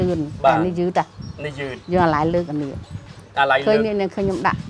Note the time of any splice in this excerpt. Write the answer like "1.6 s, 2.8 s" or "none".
none